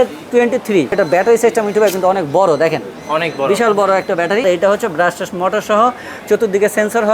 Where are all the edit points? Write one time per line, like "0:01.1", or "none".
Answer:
0:00.9
0:04.4